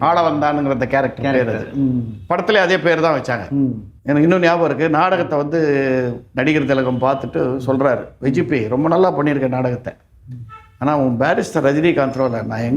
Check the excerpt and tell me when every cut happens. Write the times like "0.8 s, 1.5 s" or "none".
3.9 s

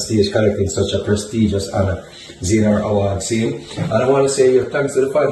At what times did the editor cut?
none

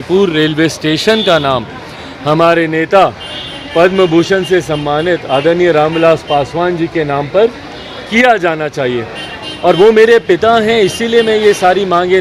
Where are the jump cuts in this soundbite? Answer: none

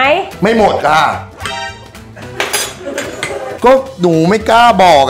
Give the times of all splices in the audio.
none

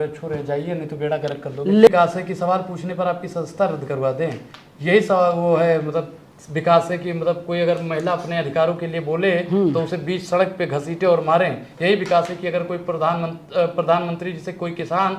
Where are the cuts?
1.9 s

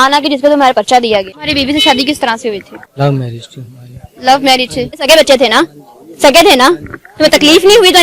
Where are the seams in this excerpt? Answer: 1.4 s, 2.8 s, 5.0 s

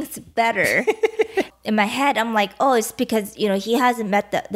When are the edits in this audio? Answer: 1.5 s

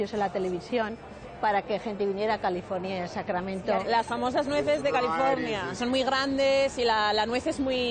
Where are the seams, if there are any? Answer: 3.8 s, 5.7 s

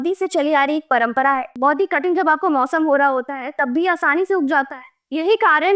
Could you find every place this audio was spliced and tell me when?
1.6 s

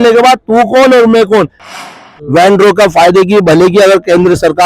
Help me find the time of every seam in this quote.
1.9 s

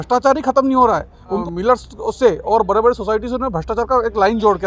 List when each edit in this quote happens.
1.4 s

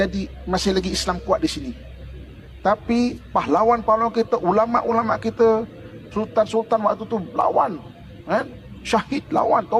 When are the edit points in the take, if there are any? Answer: none

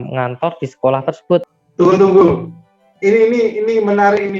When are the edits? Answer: 1.6 s, 2.9 s

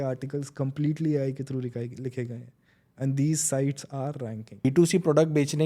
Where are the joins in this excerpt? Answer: 4.6 s

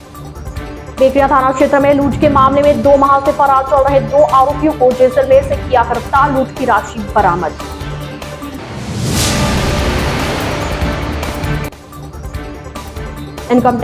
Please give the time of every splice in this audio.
0.9 s

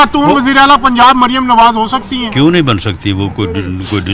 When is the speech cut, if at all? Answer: none

